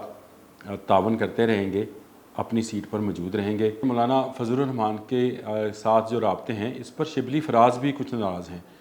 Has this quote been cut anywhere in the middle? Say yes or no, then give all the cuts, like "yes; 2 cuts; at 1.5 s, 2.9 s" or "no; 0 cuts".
yes; 1 cut; at 3.8 s